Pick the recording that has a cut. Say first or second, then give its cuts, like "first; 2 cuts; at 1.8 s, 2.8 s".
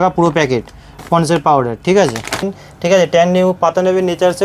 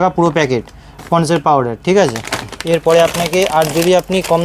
first; 1 cut; at 2.5 s